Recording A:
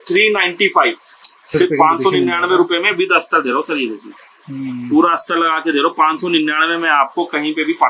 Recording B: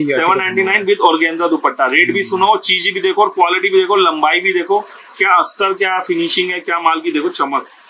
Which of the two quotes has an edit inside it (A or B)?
A